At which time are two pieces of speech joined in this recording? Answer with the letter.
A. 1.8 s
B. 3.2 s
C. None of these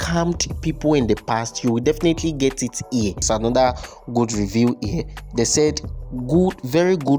B